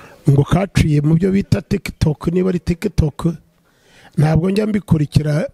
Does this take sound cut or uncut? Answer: uncut